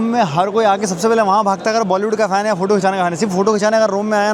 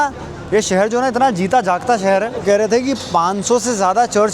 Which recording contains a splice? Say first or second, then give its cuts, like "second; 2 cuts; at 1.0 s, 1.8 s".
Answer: second; 1 cut; at 2.4 s